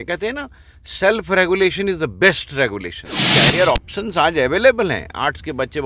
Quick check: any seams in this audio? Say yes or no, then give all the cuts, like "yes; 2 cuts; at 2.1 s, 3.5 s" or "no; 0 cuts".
yes; 1 cut; at 3.2 s